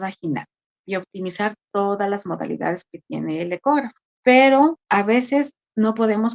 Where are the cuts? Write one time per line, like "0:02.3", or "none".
0:04.0
0:04.8